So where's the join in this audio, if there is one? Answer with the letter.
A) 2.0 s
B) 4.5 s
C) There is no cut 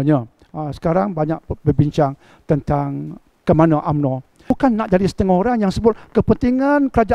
B